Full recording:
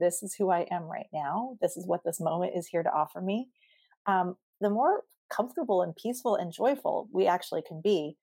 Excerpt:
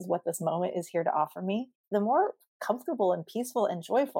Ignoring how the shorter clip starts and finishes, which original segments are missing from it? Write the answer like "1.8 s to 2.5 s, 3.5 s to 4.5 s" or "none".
3.6 s to 4.5 s